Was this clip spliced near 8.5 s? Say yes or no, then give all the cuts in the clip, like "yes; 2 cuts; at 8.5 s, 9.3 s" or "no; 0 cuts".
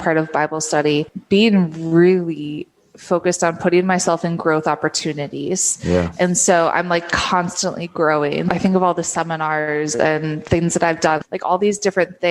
yes; 2 cuts; at 8.5 s, 11.2 s